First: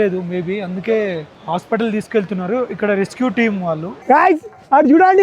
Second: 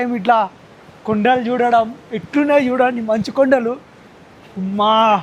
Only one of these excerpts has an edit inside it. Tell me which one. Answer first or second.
first